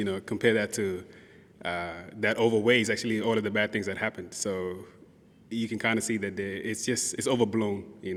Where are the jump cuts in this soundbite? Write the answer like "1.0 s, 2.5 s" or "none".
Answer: none

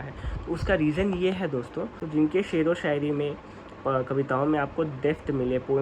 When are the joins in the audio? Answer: 1.9 s

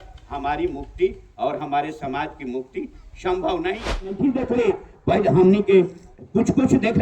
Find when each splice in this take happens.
4.2 s

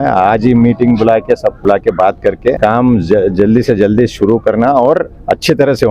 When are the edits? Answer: 1.6 s, 2.6 s

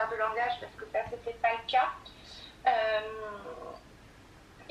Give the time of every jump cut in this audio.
none

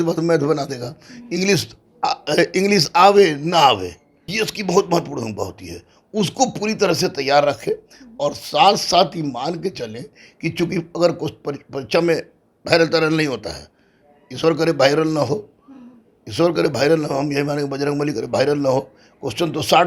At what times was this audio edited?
4.2 s

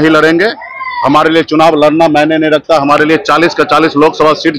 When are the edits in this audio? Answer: none

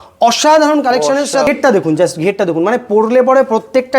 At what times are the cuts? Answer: 1.5 s

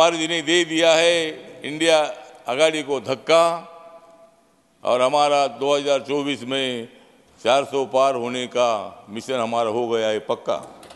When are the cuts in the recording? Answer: none

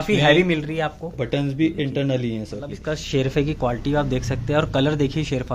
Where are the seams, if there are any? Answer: 2.7 s

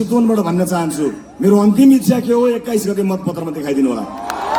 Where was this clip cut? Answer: none

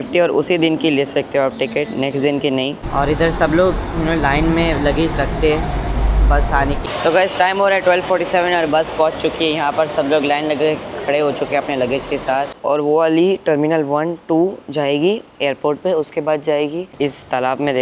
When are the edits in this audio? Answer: 2.8 s, 6.8 s, 12.5 s, 16.9 s

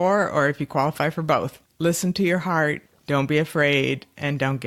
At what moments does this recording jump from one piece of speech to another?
1.6 s, 2.9 s

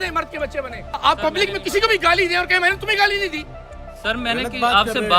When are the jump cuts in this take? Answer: 1.0 s

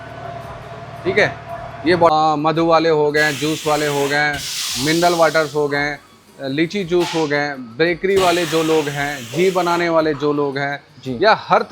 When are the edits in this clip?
2.1 s

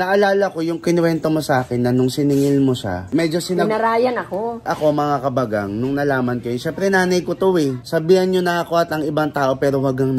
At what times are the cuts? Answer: 4.7 s, 7.8 s

